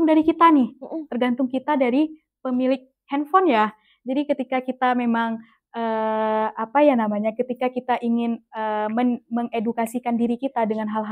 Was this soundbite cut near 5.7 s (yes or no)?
no